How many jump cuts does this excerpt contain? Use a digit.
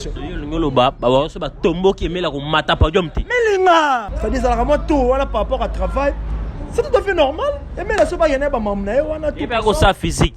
1